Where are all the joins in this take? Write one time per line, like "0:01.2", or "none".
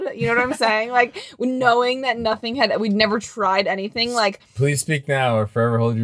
none